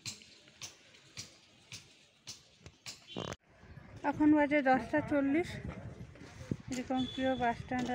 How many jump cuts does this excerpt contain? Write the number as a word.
one